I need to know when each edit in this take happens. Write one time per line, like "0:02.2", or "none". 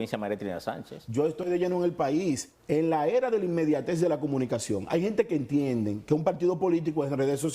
0:02.5

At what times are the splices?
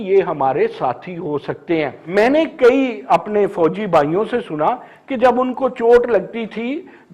0:02.0

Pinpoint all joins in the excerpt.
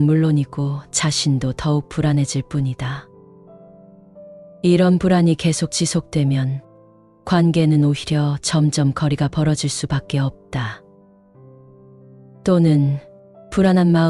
0:03.1
0:04.6

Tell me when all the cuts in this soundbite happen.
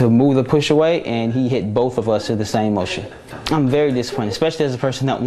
0:03.4

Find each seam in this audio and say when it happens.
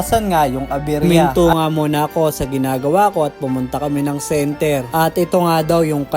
0:01.1

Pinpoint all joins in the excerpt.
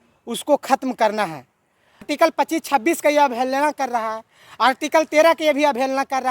0:02.1

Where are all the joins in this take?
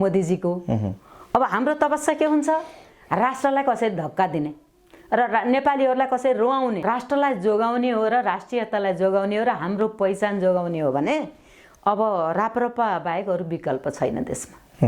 0:06.8

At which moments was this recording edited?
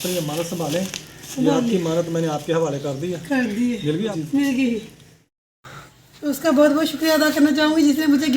0:04.0
0:05.3

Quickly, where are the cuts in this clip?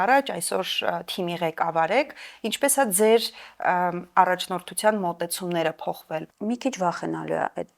0:06.3

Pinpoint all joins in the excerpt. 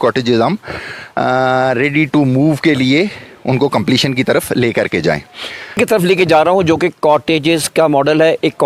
0:05.8

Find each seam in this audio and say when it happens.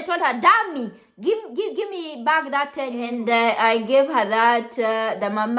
0:03.1

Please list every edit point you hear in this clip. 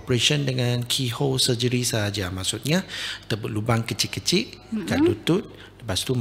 none

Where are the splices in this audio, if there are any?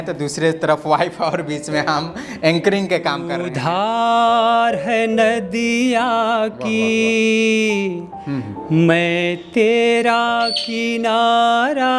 0:03.5

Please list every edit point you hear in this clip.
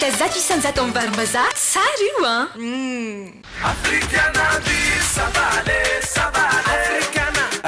0:03.4

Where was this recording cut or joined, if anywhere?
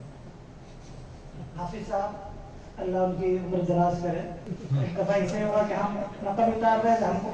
0:04.5

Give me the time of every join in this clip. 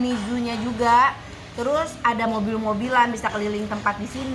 none

